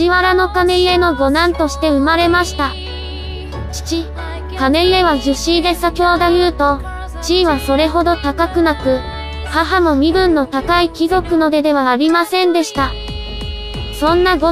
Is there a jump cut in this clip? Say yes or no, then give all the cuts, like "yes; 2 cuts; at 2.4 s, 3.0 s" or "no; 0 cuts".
no; 0 cuts